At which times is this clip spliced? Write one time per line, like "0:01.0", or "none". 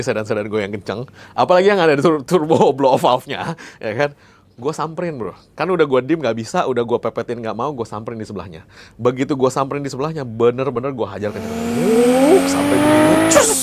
none